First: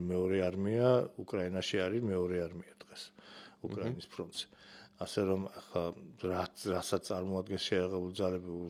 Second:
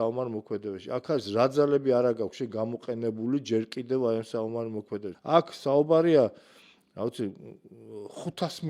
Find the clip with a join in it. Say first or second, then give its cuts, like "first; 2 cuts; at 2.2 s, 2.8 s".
second; 1 cut; at 5.1 s